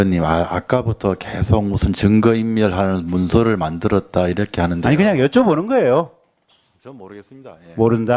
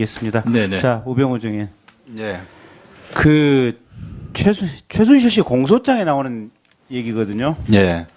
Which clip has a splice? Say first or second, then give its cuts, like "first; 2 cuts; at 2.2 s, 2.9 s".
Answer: second; 1 cut; at 1.4 s